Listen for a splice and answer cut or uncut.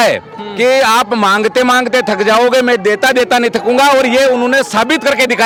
uncut